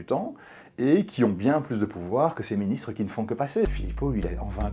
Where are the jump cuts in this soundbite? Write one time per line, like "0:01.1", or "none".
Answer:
0:03.7